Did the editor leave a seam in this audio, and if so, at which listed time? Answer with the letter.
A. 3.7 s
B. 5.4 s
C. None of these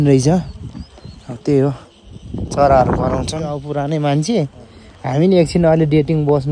A